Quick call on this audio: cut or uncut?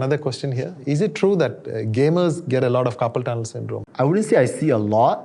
uncut